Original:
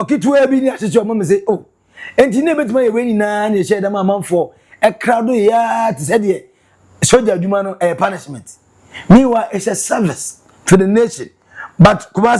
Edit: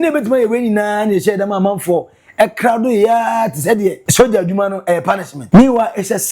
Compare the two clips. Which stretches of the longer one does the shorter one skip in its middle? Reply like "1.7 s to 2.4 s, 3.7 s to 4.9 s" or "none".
6.5 s to 7.0 s, 8.3 s to 8.9 s